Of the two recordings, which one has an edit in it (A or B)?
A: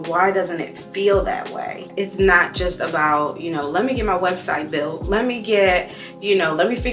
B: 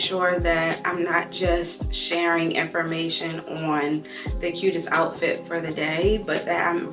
A